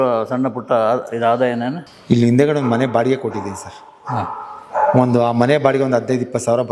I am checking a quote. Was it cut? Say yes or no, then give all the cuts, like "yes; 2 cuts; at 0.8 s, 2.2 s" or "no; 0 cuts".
yes; 1 cut; at 1.8 s